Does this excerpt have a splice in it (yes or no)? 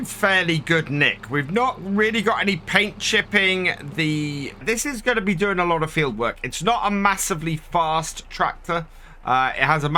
yes